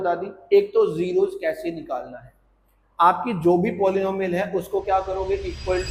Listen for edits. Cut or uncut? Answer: uncut